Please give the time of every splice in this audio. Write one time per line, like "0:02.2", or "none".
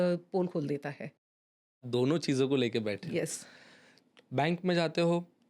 none